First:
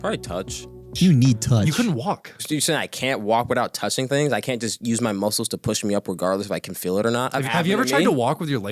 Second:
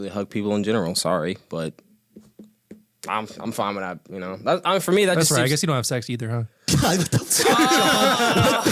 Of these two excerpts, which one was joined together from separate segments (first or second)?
first